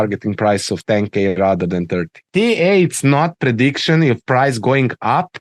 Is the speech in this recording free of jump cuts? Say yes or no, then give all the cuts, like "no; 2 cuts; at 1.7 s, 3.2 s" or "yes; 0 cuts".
no; 1 cut; at 2.2 s